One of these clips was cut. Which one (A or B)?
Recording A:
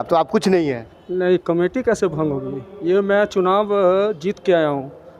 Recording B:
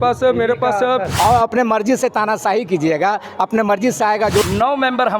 B